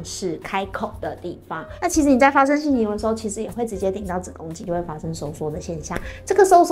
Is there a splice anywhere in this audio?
yes; 2 cuts; at 1.7 s, 4.6 s

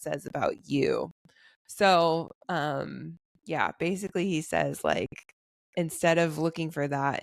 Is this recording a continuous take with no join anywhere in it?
yes; 0 cuts

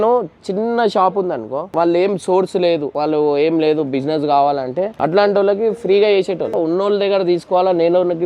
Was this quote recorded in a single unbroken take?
no; 4 cuts; at 1.7 s, 2.9 s, 4.9 s, 6.6 s

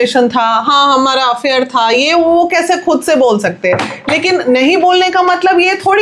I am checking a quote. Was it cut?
no; 0 cuts

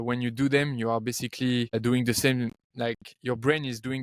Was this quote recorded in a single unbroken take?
no; 2 cuts; at 1.7 s, 2.6 s

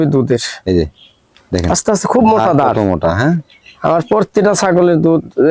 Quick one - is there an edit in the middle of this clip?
no; 0 cuts

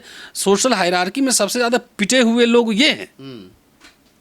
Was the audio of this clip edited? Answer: no; 0 cuts

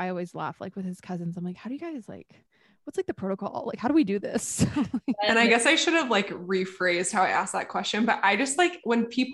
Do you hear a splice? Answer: no; 0 cuts

